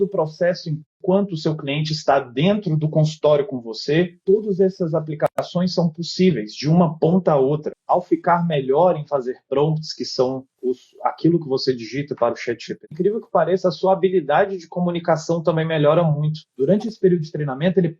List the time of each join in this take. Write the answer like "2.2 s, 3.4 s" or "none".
7.8 s, 12.8 s, 16.5 s